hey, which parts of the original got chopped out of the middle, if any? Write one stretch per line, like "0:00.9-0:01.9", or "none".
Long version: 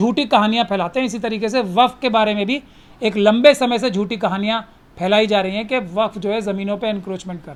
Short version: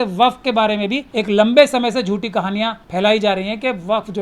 0:02.6-0:02.9
0:04.7-0:04.9